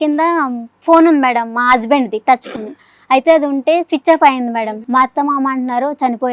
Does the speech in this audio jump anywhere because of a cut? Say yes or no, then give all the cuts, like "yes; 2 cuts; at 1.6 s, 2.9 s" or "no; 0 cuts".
yes; 1 cut; at 4.6 s